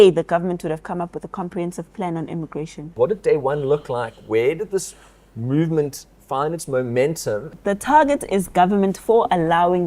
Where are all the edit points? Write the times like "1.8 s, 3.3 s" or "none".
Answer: 2.9 s, 7.5 s